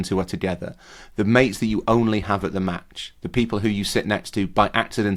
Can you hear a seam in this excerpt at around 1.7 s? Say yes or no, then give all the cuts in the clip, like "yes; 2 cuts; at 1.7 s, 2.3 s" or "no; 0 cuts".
no; 0 cuts